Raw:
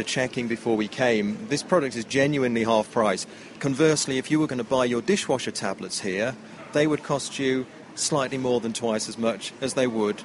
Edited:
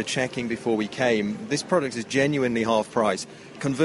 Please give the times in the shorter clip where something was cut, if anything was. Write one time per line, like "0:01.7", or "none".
none